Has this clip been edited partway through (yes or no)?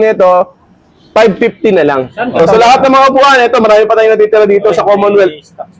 yes